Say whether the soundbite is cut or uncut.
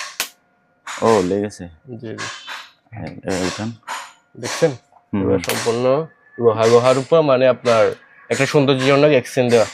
uncut